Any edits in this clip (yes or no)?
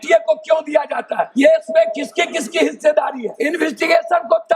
yes